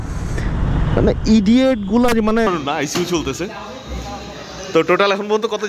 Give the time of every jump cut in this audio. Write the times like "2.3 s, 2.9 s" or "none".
2.5 s